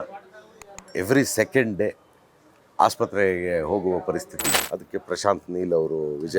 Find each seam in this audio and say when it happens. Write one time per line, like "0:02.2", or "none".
0:04.4